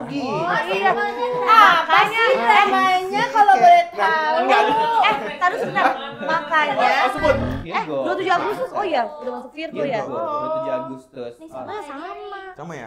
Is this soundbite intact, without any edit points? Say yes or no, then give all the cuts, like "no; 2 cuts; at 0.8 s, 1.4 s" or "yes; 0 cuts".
no; 1 cut; at 7.4 s